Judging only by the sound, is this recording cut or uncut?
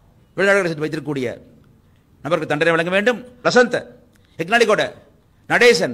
cut